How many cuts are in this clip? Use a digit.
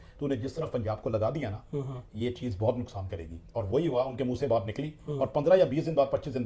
0